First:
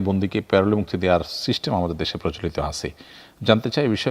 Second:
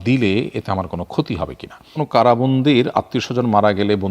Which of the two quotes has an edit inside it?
second; 1 cut; at 2.0 s

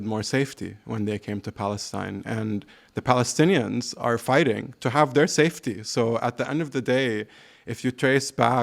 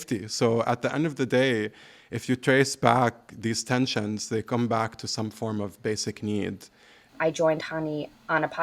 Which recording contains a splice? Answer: second; 1 cut; at 7.1 s

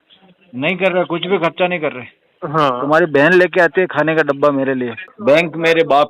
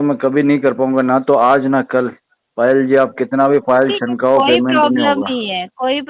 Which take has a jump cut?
first; 2 cuts; at 2.3 s, 5.0 s

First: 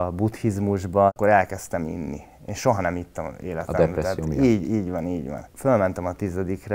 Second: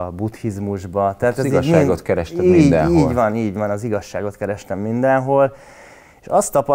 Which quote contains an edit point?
first; 2 cuts; at 1.2 s, 5.5 s

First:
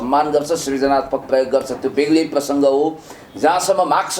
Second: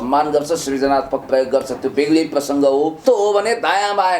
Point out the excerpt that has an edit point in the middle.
second; 1 cut; at 3.0 s

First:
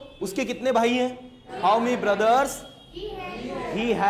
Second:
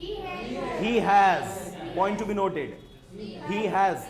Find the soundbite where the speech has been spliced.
first; 1 cut; at 1.4 s

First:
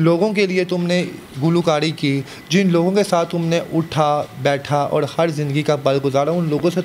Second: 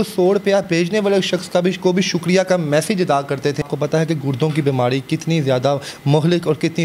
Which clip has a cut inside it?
second; 1 cut; at 3.6 s

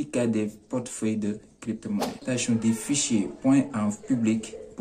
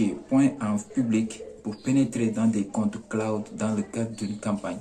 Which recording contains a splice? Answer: first; 1 cut; at 2.2 s

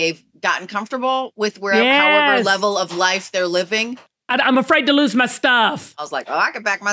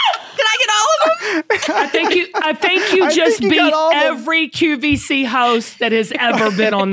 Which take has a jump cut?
first; 2 cuts; at 4.3 s, 6.0 s

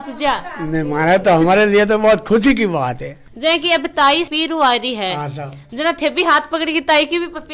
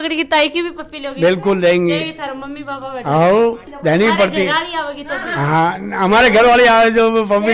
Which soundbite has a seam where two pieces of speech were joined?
first; 2 cuts; at 3.2 s, 4.3 s

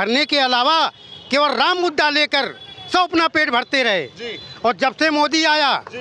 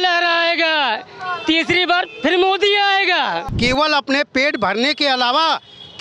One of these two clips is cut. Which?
second; 1 cut; at 3.5 s

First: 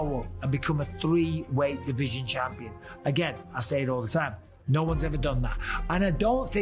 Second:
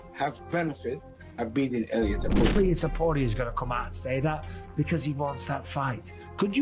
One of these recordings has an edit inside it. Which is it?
second; 1 cut; at 2.5 s

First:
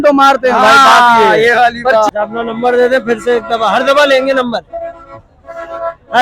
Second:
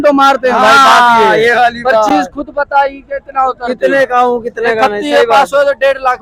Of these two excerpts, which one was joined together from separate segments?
first; 1 cut; at 2.1 s

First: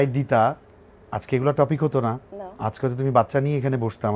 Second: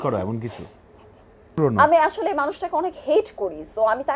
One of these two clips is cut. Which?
second; 1 cut; at 1.5 s

